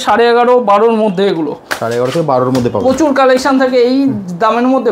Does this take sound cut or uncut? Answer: uncut